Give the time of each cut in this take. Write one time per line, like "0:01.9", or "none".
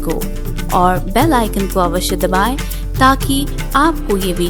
none